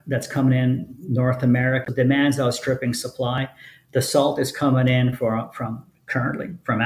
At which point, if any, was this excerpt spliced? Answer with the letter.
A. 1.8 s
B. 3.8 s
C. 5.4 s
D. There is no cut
A